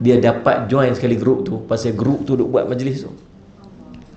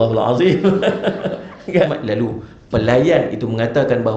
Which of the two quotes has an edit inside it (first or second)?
second